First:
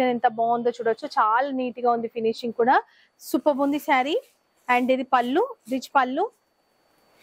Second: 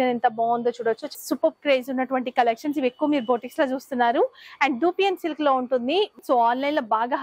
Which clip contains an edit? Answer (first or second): second